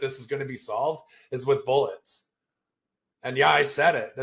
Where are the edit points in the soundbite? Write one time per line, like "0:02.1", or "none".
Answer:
0:02.1